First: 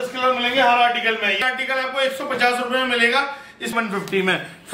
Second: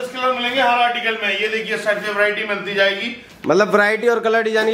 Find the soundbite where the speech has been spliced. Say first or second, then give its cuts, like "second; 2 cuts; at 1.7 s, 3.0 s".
first; 2 cuts; at 1.4 s, 3.7 s